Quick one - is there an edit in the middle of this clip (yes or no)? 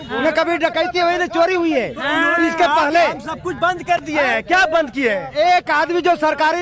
no